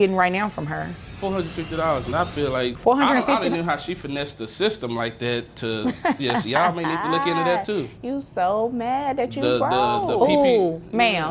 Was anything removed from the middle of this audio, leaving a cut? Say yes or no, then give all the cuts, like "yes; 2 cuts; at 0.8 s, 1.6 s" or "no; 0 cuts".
yes; 2 cuts; at 1.0 s, 2.8 s